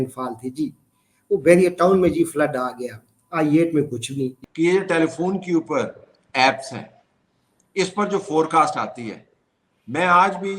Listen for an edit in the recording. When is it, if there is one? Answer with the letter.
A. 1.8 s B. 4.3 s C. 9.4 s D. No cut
B